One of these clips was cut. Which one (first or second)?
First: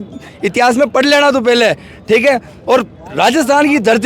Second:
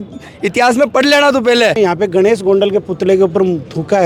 second